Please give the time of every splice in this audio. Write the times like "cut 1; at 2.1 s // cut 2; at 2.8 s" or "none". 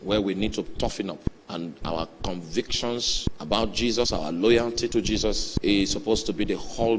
cut 1; at 1.3 s // cut 2; at 3.2 s // cut 3; at 5.5 s